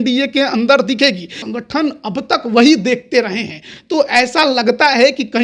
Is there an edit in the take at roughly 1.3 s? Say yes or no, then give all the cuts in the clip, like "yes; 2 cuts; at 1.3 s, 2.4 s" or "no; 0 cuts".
yes; 1 cut; at 1.3 s